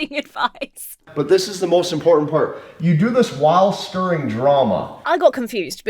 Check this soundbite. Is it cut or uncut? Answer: cut